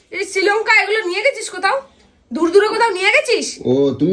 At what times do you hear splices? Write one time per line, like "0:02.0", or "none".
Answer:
none